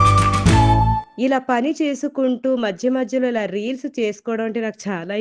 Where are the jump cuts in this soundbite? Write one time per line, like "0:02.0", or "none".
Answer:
none